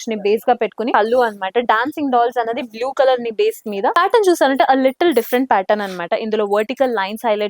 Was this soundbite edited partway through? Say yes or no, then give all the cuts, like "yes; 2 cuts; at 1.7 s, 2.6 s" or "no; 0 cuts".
yes; 2 cuts; at 0.9 s, 3.9 s